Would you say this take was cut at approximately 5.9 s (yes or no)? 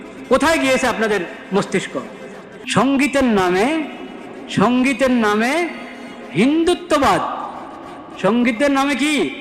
no